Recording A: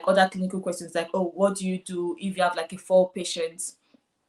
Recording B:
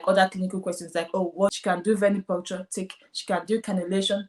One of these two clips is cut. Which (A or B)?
B